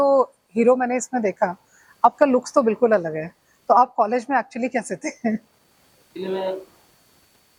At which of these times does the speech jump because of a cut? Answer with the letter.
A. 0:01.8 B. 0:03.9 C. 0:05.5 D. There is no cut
D